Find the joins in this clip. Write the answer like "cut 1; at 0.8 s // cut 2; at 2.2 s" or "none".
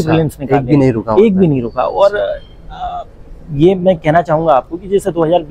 none